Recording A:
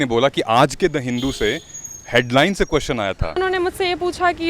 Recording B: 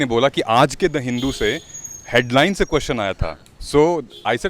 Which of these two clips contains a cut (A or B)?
A